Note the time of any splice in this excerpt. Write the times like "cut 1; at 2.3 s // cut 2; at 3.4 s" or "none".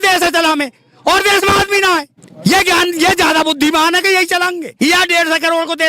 cut 1; at 2.2 s // cut 2; at 4.7 s

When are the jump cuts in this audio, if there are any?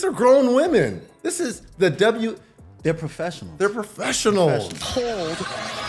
cut 1; at 4.9 s

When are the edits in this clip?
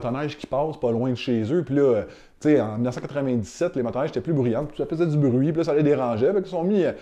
none

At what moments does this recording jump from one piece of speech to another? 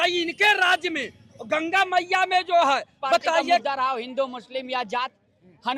cut 1; at 3.6 s

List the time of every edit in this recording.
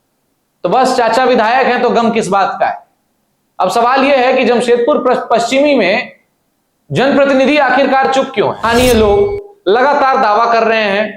cut 1; at 8.6 s

